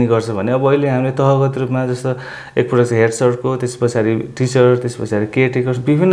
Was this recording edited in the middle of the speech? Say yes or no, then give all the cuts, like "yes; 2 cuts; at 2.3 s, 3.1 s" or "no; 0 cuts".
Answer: no; 0 cuts